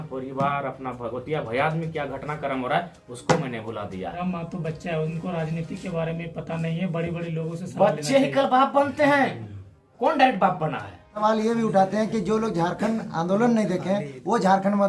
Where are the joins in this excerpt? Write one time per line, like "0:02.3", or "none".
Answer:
0:04.2
0:11.1